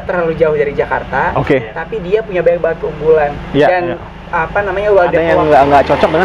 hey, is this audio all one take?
no; 1 cut; at 5.3 s

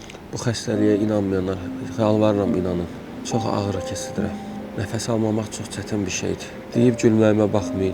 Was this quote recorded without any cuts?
no; 3 cuts; at 3.2 s, 4.5 s, 6.6 s

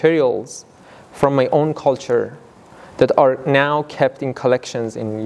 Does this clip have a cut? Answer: no; 0 cuts

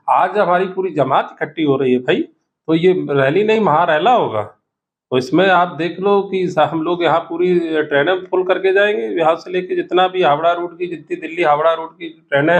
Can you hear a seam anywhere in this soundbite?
no; 0 cuts

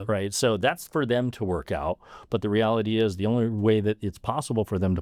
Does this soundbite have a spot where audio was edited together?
no; 0 cuts

